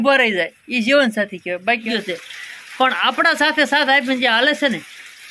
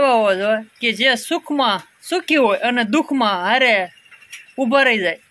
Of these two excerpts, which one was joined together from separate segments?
first; 1 cut; at 1.8 s

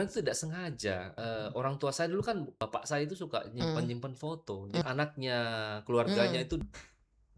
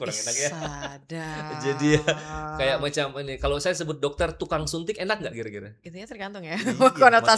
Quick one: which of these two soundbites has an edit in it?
first; 4 cuts; at 1.1 s, 2.5 s, 4.8 s, 6.6 s

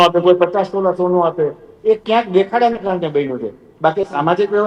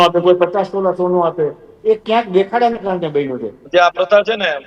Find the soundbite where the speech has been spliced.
second; 1 cut; at 3.5 s

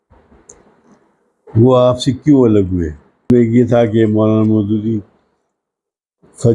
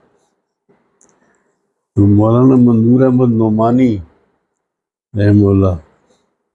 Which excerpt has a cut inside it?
first; 1 cut; at 3.3 s

